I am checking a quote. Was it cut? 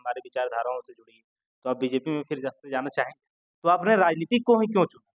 yes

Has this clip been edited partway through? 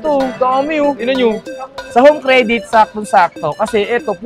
yes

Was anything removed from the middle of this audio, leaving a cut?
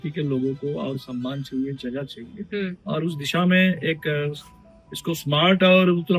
no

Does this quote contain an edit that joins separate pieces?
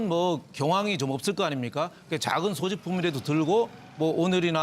yes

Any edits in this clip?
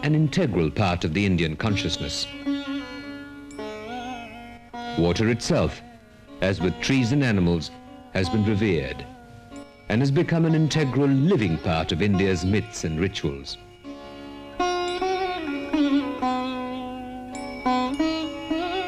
no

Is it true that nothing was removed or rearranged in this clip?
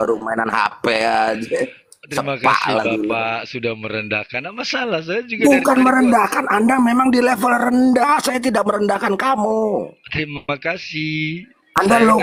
yes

